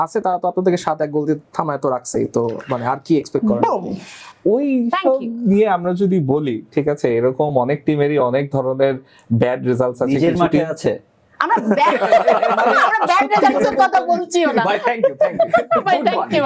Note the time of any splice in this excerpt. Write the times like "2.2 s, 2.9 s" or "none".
none